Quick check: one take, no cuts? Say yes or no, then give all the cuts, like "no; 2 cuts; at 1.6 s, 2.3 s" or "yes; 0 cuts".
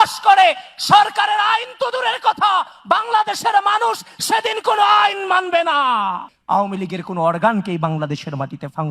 no; 1 cut; at 6.3 s